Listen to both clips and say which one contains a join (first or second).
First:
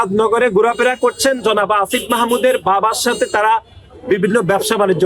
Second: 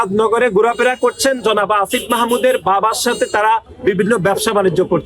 second